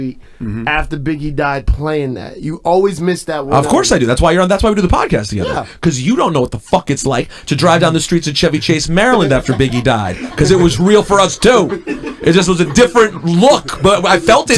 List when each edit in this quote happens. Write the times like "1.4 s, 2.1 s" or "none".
none